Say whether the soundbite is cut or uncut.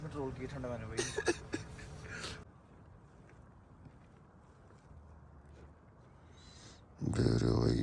cut